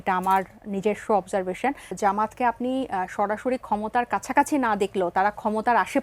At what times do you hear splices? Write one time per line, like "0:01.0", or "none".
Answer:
0:01.9